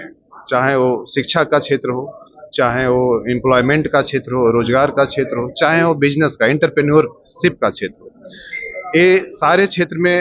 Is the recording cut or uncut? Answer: uncut